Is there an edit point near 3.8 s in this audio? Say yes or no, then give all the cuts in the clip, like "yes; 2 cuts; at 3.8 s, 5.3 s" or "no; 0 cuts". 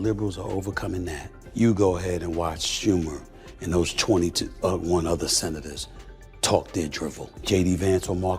no; 2 cuts; at 1.3 s, 7.3 s